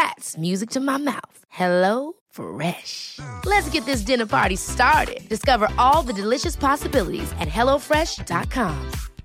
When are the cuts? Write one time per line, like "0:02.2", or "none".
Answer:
none